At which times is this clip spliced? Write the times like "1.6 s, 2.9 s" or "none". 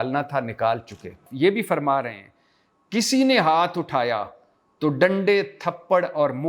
1.2 s